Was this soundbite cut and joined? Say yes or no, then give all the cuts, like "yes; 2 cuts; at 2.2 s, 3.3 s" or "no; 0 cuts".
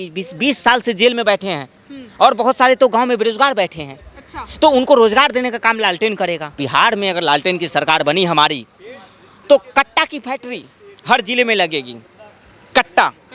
yes; 1 cut; at 6.6 s